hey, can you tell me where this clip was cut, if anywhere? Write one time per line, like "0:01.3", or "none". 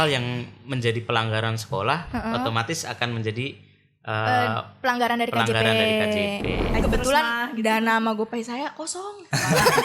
0:06.7